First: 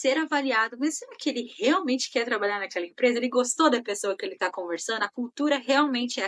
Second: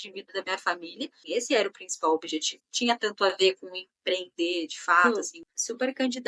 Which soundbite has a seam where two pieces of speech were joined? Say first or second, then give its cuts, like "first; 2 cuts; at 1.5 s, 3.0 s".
second; 3 cuts; at 1.2 s, 2.6 s, 5.1 s